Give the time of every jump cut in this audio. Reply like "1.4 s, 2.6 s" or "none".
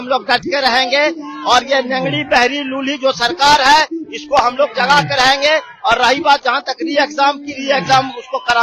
none